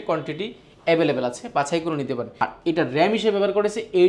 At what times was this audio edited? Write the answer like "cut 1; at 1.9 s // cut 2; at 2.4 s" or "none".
cut 1; at 2.4 s